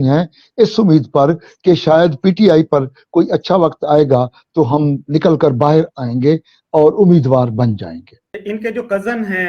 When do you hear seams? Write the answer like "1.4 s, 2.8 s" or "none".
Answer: 8.4 s